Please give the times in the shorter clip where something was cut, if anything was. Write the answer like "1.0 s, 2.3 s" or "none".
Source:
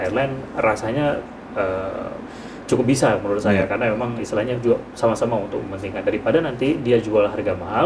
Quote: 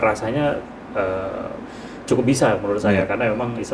none